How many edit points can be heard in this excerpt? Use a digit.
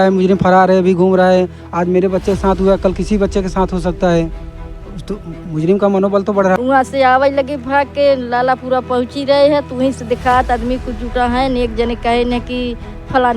1